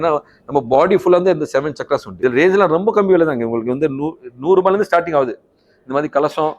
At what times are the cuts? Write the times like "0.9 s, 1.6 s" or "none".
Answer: 2.1 s